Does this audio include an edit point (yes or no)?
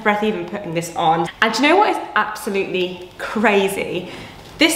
yes